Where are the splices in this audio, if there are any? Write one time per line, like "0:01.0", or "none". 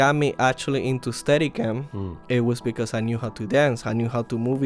none